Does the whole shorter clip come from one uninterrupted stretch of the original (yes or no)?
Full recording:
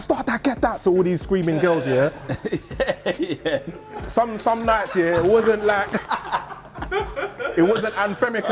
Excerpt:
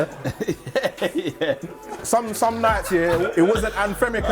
no